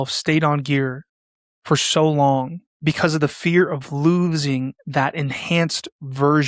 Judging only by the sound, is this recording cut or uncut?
cut